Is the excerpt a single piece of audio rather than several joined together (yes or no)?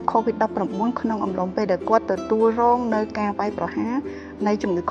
yes